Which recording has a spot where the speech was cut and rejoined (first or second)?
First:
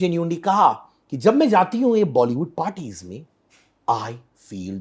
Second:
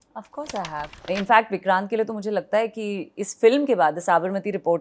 second